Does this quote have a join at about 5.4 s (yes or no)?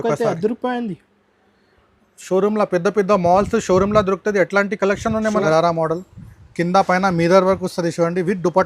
yes